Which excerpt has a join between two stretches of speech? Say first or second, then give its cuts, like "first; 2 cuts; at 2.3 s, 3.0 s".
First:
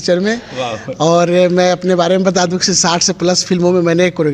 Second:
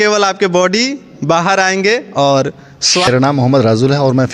second; 1 cut; at 3.1 s